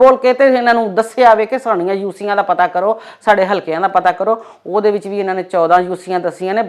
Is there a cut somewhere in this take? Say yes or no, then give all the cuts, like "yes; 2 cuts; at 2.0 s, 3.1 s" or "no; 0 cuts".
no; 0 cuts